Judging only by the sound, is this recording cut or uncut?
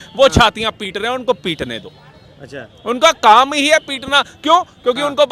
uncut